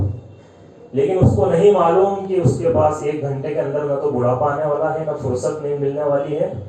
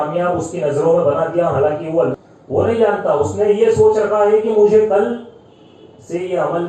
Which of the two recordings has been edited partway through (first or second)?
second